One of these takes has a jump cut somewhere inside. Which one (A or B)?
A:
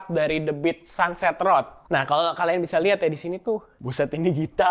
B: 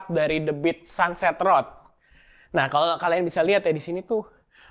A